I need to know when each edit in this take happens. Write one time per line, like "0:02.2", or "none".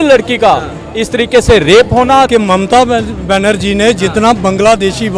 0:02.3